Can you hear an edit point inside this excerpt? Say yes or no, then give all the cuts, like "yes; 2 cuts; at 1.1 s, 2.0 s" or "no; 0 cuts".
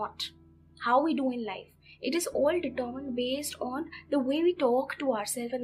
no; 0 cuts